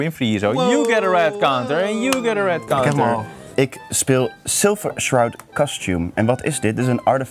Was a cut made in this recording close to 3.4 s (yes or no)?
yes